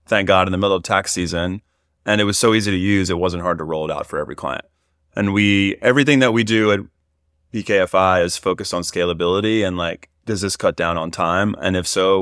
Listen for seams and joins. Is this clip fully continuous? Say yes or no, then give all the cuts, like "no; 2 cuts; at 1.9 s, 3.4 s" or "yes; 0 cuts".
yes; 0 cuts